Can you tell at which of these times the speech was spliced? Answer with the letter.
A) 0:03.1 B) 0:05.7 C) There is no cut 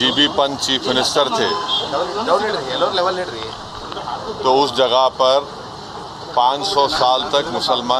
C